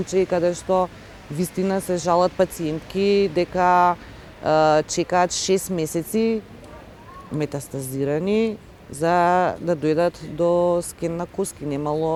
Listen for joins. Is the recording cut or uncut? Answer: uncut